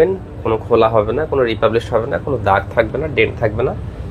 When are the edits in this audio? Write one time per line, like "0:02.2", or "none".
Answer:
none